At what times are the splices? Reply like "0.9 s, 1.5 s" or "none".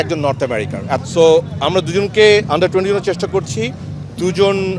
1.0 s